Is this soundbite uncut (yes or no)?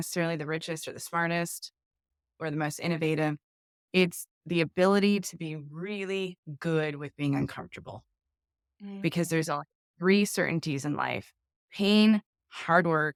yes